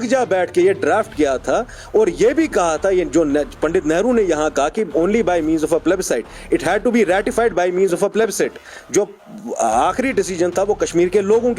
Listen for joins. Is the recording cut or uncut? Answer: uncut